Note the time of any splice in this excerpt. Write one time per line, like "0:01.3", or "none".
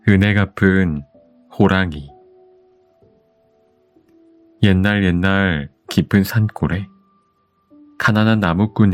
0:02.1
0:04.0